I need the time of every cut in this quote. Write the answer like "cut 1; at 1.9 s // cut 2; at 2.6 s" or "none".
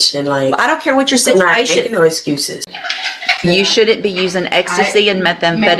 cut 1; at 2.7 s